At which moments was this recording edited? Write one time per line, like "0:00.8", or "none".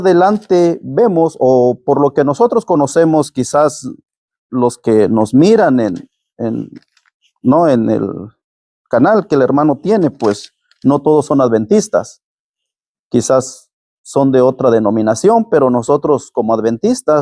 none